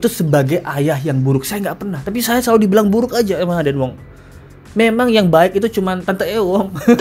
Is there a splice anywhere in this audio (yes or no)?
no